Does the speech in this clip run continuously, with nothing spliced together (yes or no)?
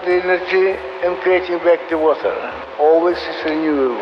no